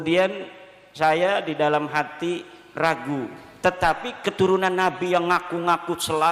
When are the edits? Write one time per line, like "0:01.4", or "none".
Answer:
0:03.4